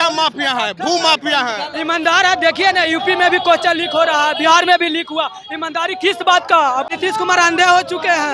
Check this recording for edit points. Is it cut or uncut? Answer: cut